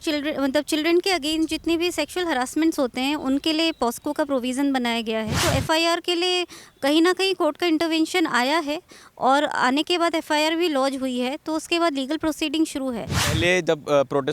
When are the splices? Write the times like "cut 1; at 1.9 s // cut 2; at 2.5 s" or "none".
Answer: cut 1; at 5.4 s // cut 2; at 13.2 s